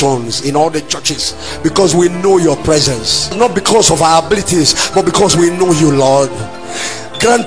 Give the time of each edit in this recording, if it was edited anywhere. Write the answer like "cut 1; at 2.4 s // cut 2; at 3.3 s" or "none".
none